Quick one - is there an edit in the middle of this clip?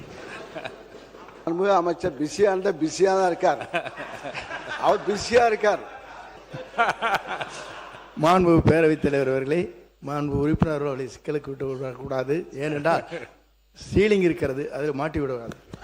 yes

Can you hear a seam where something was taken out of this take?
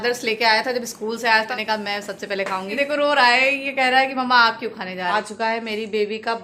yes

